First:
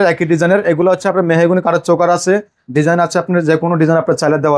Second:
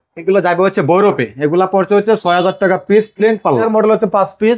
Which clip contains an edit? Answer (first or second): second